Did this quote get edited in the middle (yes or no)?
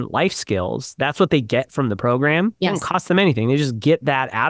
no